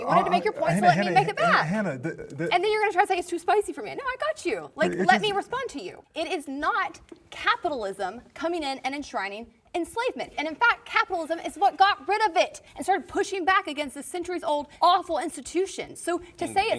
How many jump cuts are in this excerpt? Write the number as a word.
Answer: four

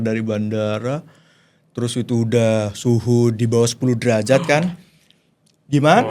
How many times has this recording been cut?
zero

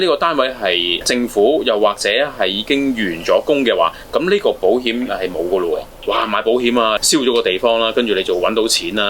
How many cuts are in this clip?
three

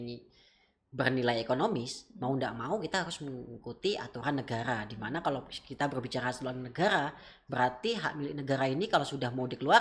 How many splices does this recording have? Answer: zero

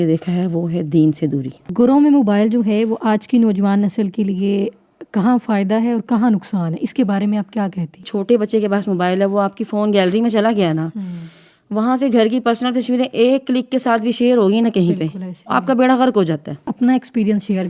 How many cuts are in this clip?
three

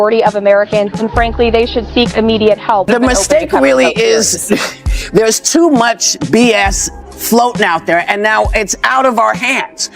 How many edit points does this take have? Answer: one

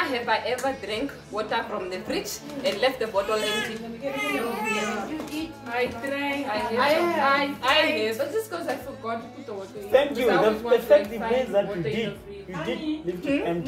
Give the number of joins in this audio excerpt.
zero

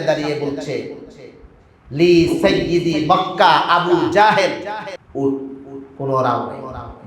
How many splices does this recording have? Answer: one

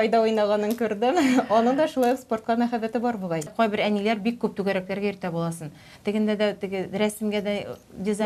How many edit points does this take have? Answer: one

